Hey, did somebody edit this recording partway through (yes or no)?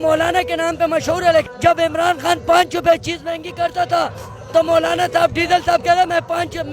yes